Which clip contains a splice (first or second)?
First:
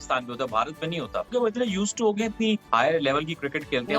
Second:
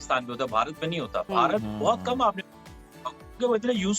first